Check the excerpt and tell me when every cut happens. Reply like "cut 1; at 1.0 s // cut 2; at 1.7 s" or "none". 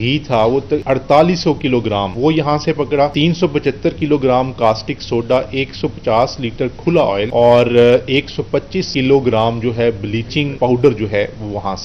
cut 1; at 0.8 s // cut 2; at 2.1 s // cut 3; at 3.1 s // cut 4; at 7.3 s // cut 5; at 8.8 s // cut 6; at 10.5 s